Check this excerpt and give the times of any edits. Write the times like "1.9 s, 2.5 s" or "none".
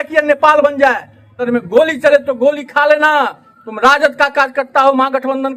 1.4 s